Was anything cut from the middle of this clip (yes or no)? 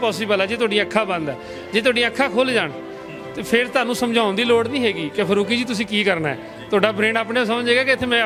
no